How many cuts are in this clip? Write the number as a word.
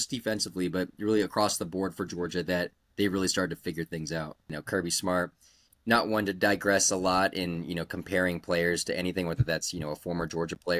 one